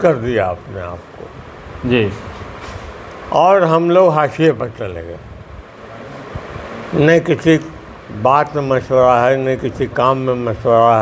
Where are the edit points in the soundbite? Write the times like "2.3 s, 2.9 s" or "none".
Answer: none